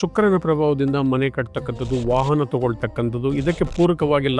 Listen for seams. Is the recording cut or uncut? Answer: uncut